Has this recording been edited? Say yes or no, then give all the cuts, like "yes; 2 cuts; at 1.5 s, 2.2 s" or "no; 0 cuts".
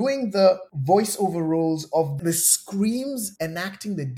no; 0 cuts